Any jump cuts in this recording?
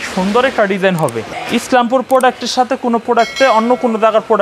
yes; 1 cut; at 1.3 s

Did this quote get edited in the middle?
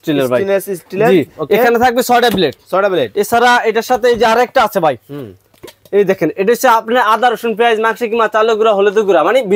no; 0 cuts

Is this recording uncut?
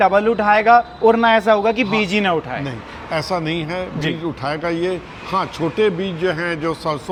yes; 0 cuts

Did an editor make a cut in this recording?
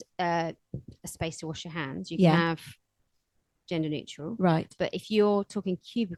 no; 0 cuts

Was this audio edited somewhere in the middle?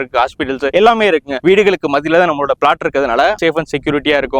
yes; 1 cut; at 3.4 s

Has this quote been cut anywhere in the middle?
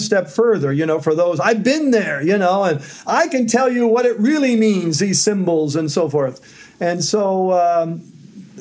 no; 0 cuts

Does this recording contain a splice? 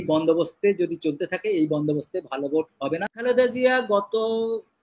yes; 1 cut; at 3.1 s

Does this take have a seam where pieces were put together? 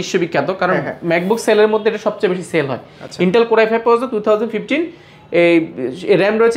no; 0 cuts

